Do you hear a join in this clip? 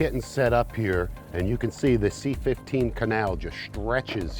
yes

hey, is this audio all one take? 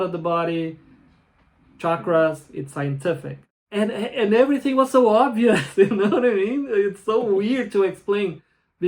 no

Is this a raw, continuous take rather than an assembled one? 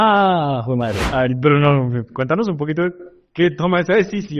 no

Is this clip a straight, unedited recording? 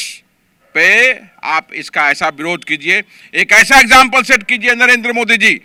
yes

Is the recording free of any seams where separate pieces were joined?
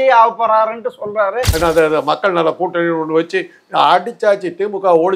no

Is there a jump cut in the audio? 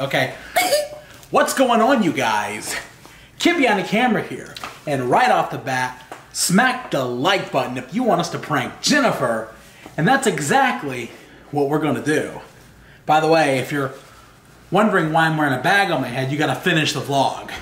no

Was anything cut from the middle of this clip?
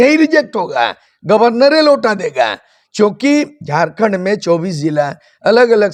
no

